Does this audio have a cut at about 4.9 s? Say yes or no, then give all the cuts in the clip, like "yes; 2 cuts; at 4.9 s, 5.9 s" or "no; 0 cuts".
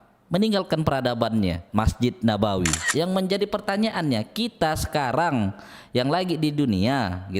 no; 1 cut; at 2.8 s